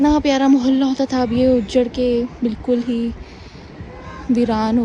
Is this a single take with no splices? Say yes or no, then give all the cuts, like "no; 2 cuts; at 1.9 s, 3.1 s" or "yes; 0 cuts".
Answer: yes; 0 cuts